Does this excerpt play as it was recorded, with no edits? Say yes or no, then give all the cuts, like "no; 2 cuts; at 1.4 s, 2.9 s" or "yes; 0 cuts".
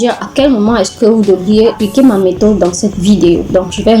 no; 1 cut; at 1.8 s